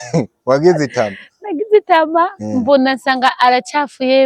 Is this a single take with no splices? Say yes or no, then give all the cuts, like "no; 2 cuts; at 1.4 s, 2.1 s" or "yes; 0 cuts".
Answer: yes; 0 cuts